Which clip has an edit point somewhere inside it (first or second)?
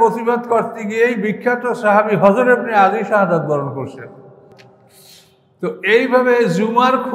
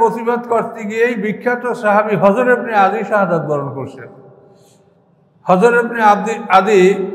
first